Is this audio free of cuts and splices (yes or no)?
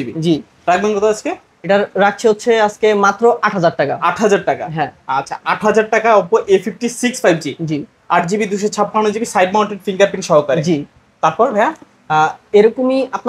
yes